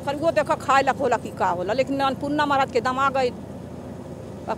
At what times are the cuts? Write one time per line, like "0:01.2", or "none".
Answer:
none